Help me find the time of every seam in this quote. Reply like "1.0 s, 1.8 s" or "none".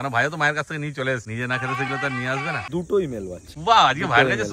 1.3 s, 2.6 s, 3.5 s